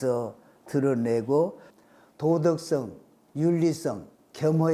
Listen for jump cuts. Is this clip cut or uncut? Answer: cut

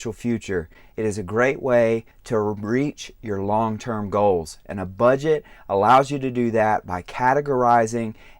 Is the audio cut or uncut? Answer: cut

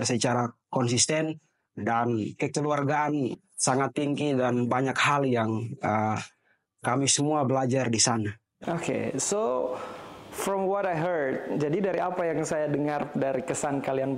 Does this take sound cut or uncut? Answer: uncut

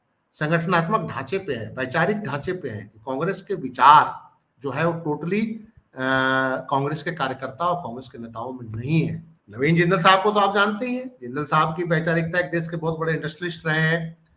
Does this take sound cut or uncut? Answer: cut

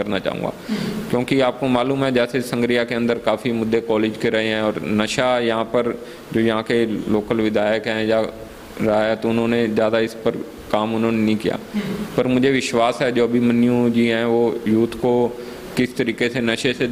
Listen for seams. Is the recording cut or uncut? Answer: uncut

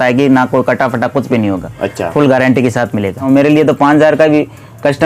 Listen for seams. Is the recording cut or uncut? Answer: cut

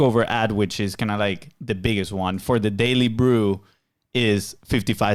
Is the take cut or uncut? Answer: uncut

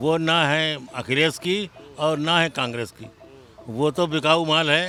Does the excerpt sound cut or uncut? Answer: uncut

